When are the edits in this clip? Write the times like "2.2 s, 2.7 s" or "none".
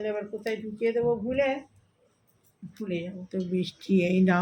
3.3 s